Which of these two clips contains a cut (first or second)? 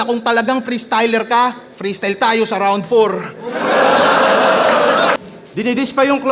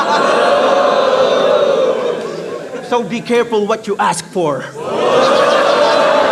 first